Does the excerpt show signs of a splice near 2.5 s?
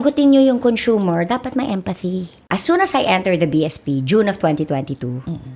yes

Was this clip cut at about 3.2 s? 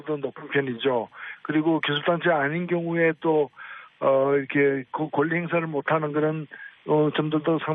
yes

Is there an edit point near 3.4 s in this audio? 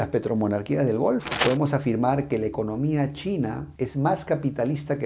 no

